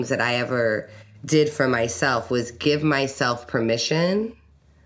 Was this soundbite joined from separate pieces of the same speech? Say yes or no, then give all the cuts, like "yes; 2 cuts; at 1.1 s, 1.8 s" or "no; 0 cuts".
no; 0 cuts